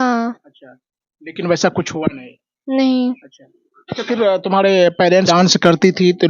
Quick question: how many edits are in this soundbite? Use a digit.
1